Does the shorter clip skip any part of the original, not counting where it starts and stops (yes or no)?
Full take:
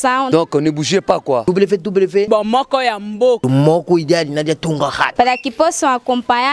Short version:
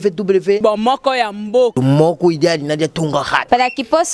no